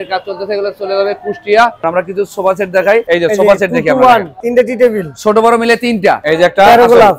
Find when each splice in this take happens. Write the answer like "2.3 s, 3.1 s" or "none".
1.8 s, 4.4 s, 6.2 s